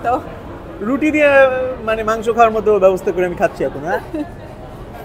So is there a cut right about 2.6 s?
no; 0 cuts

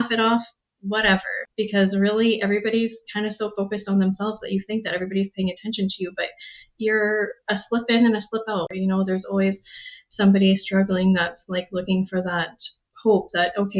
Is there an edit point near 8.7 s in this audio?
yes; 2 cuts; at 1.4 s, 8.7 s

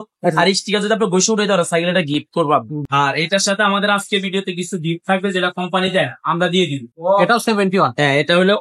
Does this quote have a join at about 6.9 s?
yes; 2 cuts; at 2.8 s, 6.9 s

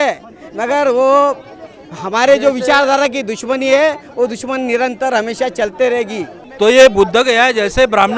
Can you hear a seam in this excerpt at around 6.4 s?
yes; 1 cut; at 6.4 s

